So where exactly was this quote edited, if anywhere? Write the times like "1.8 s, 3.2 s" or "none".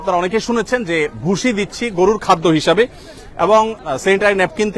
none